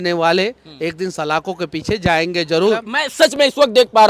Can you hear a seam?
yes; 1 cut; at 2.9 s

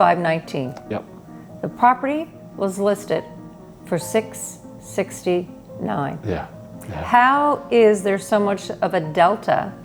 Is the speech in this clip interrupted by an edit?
no; 0 cuts

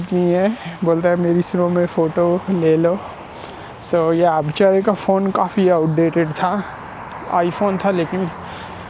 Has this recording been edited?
no; 0 cuts

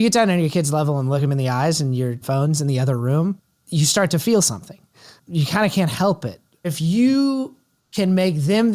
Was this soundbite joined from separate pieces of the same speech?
yes; 4 cuts; at 1.2 s, 2.2 s, 3.5 s, 6.6 s

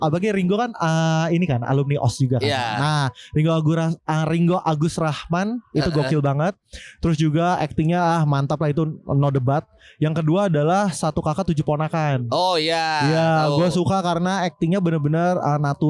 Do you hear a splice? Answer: no; 0 cuts

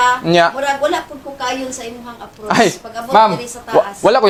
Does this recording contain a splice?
no; 0 cuts

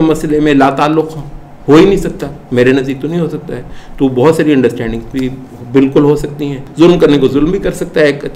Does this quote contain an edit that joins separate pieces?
yes; 1 cut; at 6.6 s

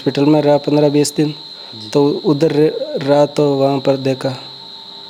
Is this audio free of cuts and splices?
yes; 0 cuts

